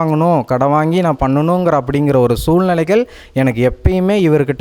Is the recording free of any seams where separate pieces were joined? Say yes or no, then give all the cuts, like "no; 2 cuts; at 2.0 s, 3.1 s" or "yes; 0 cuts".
yes; 0 cuts